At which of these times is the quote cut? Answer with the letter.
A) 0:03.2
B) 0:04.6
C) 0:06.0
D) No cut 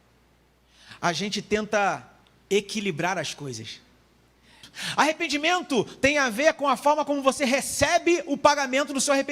B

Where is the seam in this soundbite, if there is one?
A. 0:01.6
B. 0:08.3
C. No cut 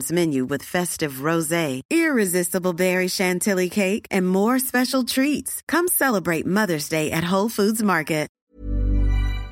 B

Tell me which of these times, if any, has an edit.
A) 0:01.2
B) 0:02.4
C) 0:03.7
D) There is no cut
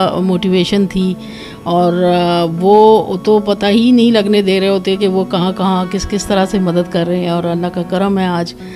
D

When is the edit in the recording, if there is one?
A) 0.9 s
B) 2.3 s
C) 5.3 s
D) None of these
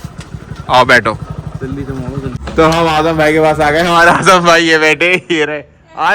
B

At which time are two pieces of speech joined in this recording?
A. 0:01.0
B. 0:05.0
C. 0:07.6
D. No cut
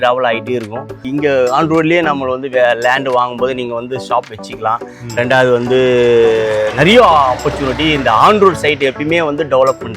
A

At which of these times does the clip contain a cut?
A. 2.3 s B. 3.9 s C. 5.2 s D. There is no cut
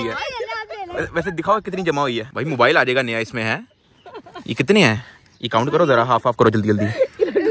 A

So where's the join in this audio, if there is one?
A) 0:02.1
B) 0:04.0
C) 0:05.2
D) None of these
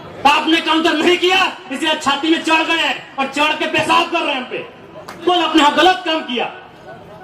C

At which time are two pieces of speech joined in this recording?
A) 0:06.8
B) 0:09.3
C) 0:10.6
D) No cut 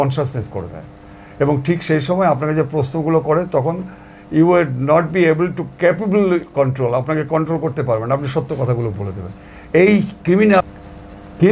C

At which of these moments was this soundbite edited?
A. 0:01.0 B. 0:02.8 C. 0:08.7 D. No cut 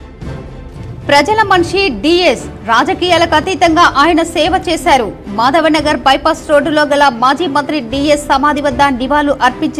A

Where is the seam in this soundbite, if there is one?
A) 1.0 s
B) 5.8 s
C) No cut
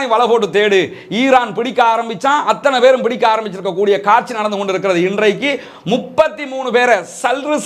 C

